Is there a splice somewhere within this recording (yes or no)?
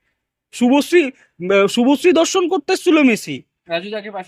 no